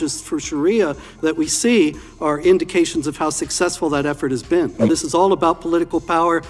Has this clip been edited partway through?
yes; 1 cut; at 4.9 s

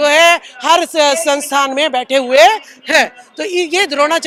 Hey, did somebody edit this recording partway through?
no; 0 cuts

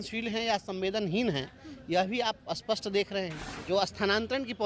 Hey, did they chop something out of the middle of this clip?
yes; 1 cut; at 3.5 s

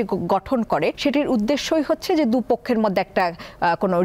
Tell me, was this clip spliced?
yes; 1 cut; at 1.0 s

